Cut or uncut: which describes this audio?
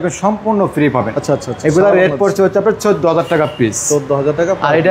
uncut